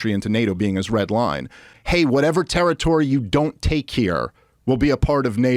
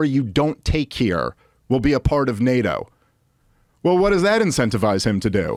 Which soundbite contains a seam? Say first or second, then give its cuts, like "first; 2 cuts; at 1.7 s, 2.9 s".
first; 1 cut; at 1.7 s